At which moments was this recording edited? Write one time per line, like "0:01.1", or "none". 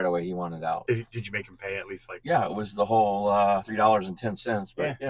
0:00.8
0:02.1
0:03.7